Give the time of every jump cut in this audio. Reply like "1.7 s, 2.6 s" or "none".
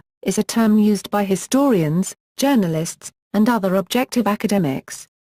none